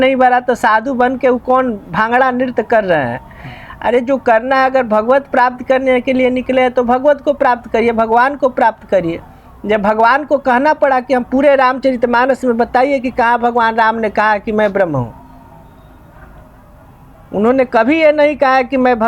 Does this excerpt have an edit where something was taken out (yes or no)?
no